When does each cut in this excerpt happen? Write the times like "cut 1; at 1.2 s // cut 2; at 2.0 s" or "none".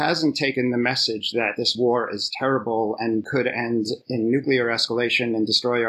none